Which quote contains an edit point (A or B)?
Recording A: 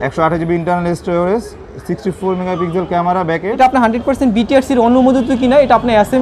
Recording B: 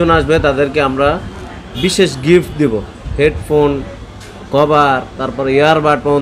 A